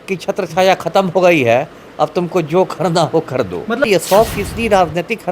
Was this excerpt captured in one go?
no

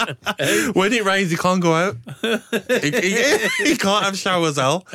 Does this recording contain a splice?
no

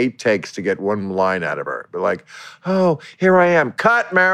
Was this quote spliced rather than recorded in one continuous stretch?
no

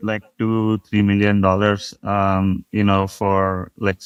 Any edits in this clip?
no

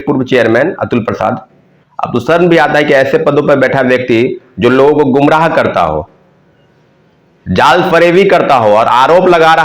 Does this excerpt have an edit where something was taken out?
no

